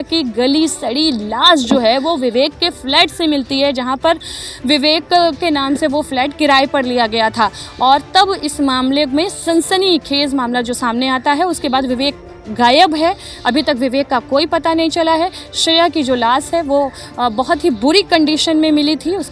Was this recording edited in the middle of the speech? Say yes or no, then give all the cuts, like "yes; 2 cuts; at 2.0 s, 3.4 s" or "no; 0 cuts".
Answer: no; 0 cuts